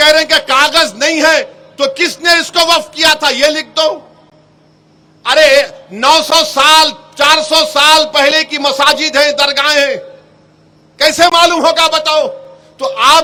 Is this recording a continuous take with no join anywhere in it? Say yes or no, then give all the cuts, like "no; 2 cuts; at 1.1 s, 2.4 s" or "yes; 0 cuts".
yes; 0 cuts